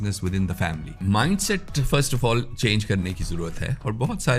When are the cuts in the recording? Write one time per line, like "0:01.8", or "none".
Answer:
0:01.0